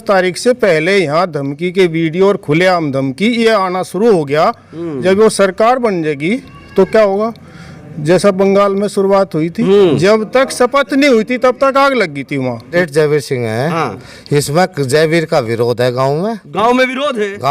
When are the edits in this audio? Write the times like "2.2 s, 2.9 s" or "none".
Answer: 12.7 s